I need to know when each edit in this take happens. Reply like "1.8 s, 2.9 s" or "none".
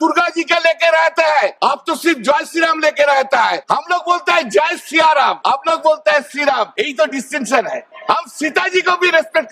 1.6 s, 3.6 s, 5.4 s, 6.7 s, 7.9 s